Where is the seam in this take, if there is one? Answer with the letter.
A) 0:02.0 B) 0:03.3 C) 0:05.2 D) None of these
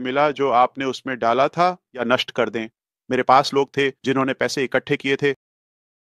A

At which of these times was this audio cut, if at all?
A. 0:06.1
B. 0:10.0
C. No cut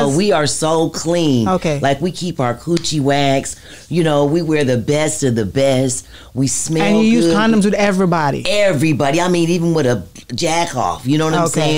C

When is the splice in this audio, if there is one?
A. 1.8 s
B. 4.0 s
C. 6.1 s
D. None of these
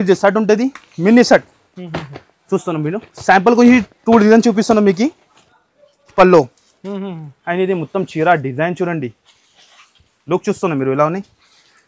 C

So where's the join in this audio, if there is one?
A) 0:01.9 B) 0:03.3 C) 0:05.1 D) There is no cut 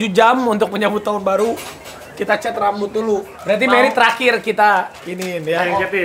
B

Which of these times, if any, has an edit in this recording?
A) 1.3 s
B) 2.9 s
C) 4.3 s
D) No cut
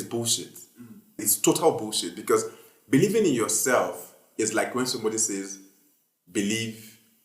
A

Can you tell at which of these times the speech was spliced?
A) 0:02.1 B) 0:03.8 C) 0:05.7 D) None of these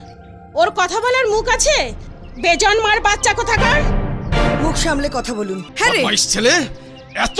C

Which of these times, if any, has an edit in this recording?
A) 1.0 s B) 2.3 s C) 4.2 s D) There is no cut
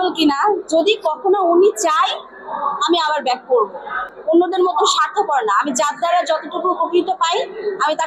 C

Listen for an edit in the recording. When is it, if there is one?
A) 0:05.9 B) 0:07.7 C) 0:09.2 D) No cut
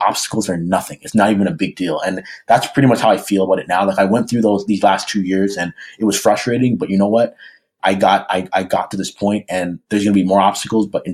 B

